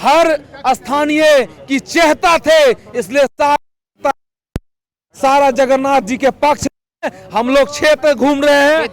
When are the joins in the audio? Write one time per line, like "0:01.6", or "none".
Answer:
none